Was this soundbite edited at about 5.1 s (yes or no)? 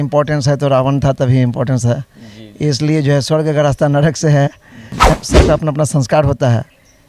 yes